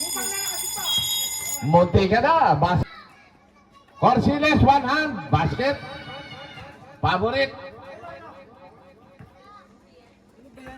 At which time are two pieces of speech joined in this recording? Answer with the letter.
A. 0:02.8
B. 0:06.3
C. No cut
A